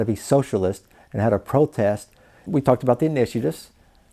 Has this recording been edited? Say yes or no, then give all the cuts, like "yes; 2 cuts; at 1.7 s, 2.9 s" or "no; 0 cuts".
yes; 1 cut; at 2.3 s